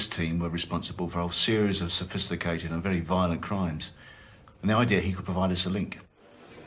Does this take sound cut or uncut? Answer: uncut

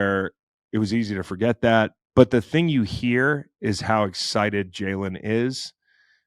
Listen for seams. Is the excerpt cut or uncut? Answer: cut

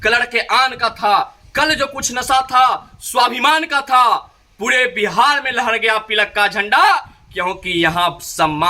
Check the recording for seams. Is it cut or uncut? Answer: uncut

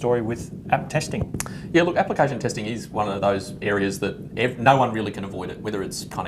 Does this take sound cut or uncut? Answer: cut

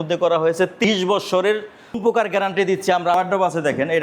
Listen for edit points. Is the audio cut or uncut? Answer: cut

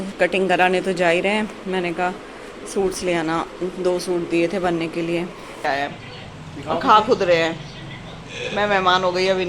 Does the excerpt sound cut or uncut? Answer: cut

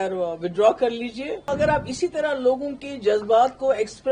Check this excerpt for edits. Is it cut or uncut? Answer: cut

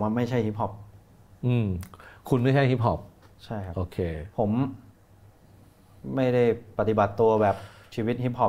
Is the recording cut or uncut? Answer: uncut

